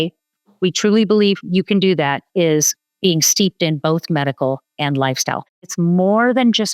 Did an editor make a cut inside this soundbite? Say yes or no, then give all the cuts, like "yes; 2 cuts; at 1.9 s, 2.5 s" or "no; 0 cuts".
yes; 2 cuts; at 2.8 s, 5.7 s